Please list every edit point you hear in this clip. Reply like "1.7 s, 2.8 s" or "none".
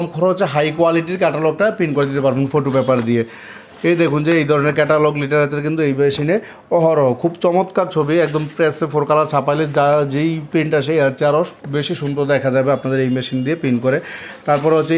none